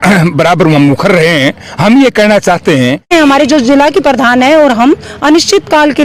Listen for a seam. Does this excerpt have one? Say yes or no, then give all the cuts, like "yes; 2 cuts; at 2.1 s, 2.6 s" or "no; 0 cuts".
yes; 1 cut; at 3.1 s